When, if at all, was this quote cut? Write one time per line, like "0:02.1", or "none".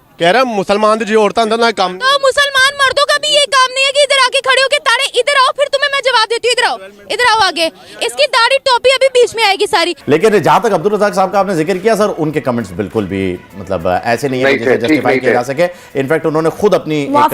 0:10.0